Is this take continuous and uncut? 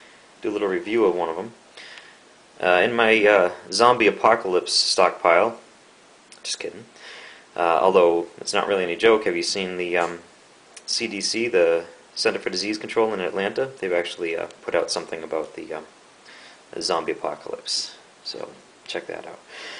no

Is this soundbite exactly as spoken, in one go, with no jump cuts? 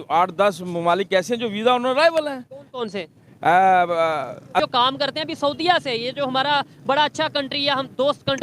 no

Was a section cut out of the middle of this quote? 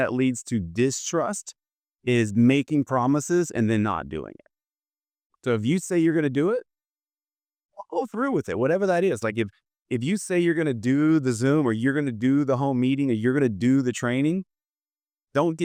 no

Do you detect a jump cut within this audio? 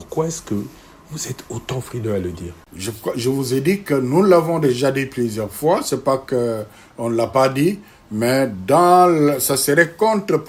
no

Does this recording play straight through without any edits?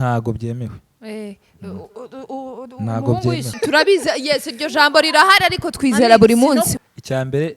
no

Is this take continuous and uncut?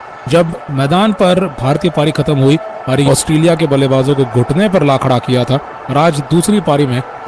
no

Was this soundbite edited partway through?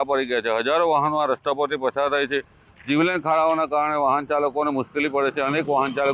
no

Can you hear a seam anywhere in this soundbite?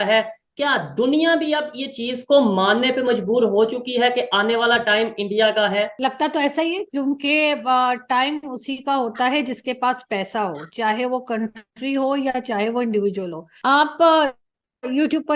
yes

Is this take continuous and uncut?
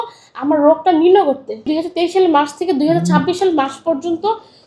no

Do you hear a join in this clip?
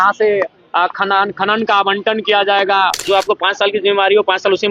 yes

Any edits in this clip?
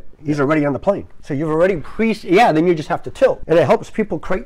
yes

